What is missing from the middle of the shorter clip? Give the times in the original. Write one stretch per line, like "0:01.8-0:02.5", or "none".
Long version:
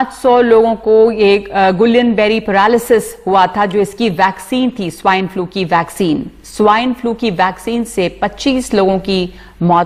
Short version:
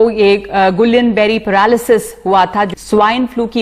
0:03.7-0:06.4